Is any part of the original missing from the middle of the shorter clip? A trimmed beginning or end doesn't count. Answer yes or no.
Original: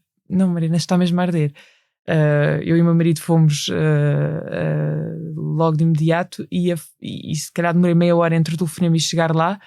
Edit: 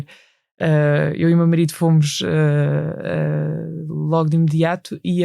no